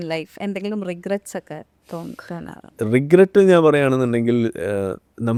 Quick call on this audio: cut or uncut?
uncut